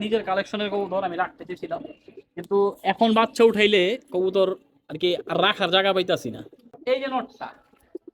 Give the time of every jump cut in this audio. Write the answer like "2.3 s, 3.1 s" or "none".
6.8 s